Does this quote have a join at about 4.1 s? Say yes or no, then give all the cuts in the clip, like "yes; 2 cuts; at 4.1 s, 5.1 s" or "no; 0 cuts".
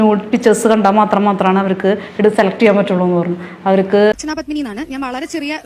yes; 1 cut; at 4.1 s